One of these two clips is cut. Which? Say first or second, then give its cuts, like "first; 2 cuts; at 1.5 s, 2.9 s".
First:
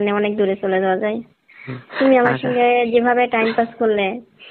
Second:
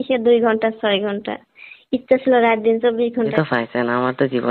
second; 1 cut; at 3.3 s